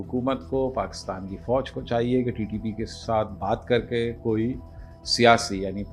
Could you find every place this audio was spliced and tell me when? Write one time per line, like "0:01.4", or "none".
none